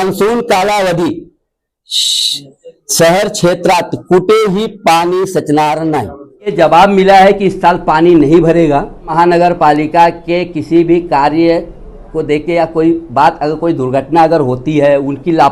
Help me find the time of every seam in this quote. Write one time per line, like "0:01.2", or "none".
0:06.5
0:09.1